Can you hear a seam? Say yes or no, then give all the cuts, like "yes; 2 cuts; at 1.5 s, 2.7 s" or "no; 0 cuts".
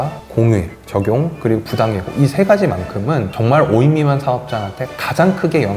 yes; 1 cut; at 3.3 s